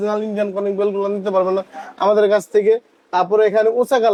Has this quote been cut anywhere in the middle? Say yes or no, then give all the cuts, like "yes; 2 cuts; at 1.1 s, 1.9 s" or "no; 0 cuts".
no; 0 cuts